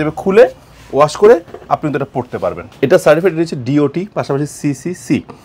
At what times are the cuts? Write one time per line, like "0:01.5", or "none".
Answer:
0:02.7